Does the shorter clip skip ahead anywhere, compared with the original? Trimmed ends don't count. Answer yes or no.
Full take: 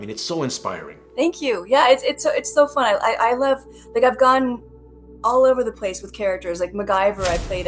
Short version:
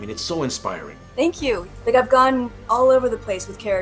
yes